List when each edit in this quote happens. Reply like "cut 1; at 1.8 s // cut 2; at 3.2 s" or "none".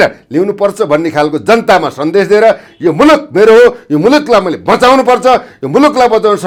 none